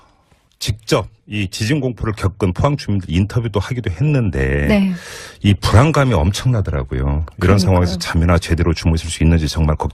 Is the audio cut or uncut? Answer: uncut